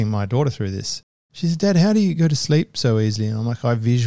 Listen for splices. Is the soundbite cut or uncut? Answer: cut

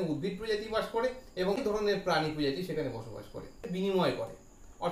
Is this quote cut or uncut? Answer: cut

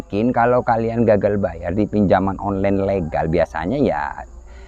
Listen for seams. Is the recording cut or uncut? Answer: uncut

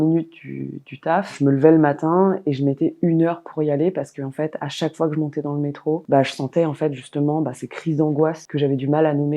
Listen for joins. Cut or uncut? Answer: uncut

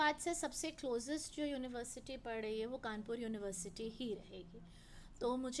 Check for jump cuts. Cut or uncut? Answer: uncut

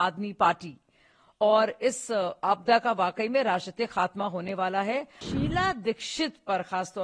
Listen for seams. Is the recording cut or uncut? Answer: cut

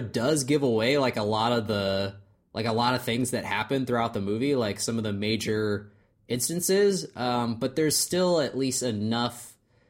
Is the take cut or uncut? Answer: uncut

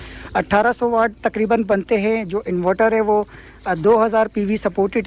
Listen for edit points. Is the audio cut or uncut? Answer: uncut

